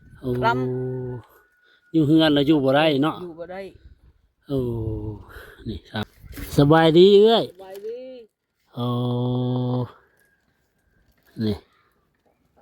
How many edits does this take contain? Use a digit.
1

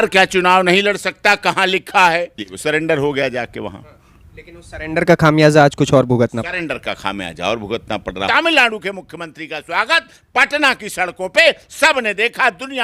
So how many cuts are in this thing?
2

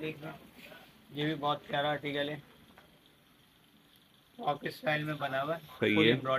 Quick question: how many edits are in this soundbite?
0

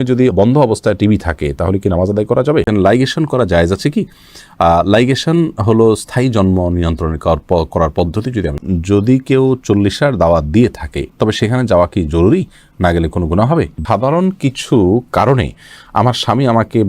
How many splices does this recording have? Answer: 3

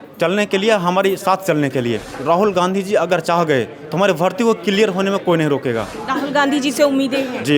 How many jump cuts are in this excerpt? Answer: 2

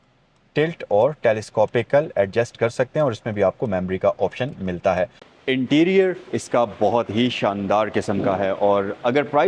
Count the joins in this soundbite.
1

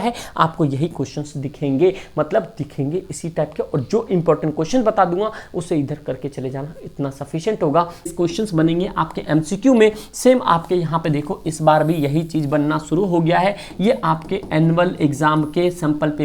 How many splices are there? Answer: 1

